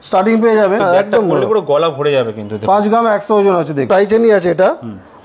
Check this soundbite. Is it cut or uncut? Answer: cut